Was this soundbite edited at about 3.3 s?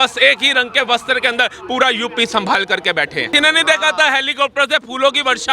yes; 1 cut; at 3.3 s

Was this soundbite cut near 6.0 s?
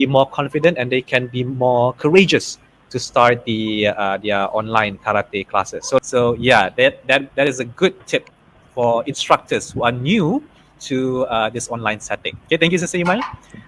yes; 1 cut; at 6.0 s

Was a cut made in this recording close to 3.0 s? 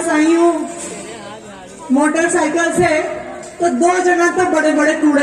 no; 0 cuts

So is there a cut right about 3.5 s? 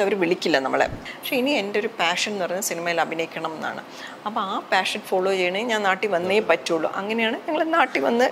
no; 1 cut; at 1.1 s

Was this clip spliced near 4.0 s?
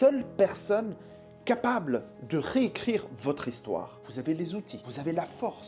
yes; 1 cut; at 4.0 s

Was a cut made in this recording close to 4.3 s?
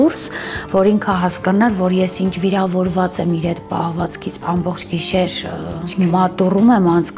yes; 1 cut; at 4.3 s

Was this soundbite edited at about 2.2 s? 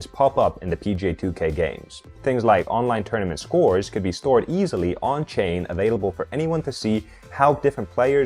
yes; 1 cut; at 2.2 s

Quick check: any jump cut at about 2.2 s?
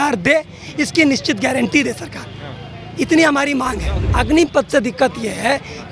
no; 1 cut; at 3.9 s

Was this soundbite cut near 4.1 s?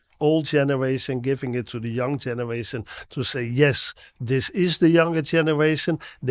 no; 0 cuts

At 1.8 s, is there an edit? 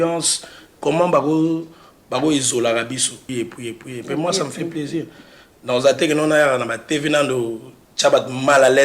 no; 1 cut; at 3.2 s

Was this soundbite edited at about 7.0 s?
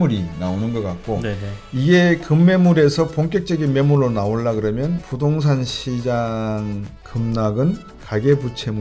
no; 1 cut; at 5.1 s

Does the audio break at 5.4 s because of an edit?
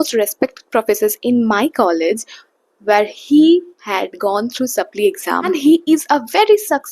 yes; 1 cut; at 5.4 s

